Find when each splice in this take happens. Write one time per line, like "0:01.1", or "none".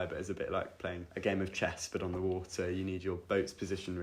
0:01.1